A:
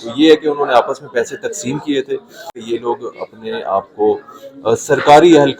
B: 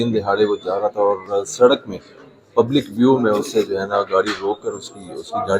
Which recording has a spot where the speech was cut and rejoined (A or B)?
A